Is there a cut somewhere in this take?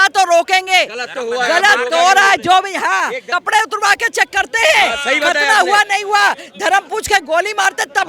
yes; 1 cut; at 3.2 s

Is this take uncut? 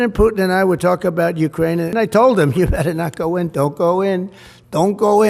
no; 1 cut; at 1.9 s

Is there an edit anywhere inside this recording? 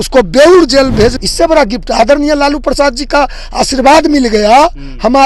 yes; 1 cut; at 1.1 s

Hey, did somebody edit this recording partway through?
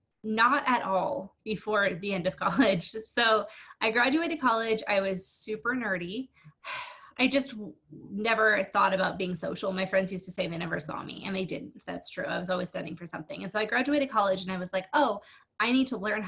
yes; 1 cut; at 6.4 s

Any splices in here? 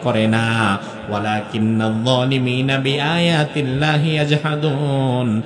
no; 0 cuts

